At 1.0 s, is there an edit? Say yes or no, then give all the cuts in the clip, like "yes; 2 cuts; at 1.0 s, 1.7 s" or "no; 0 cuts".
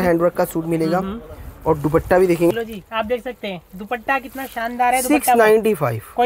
no; 1 cut; at 2.5 s